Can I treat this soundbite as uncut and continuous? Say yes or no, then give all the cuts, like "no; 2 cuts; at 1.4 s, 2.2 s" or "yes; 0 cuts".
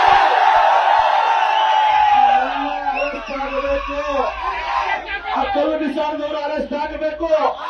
yes; 0 cuts